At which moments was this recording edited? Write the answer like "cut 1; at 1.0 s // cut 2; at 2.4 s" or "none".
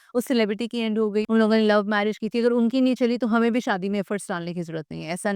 cut 1; at 1.2 s